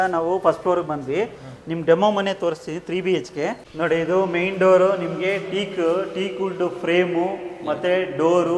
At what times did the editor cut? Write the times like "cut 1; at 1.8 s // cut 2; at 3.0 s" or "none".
none